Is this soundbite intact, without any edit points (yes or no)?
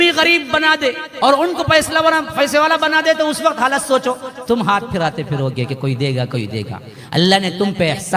yes